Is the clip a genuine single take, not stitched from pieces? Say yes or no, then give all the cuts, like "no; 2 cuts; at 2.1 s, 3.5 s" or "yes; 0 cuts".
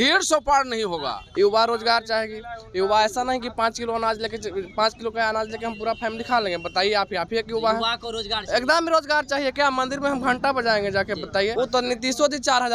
no; 2 cuts; at 1.2 s, 11.5 s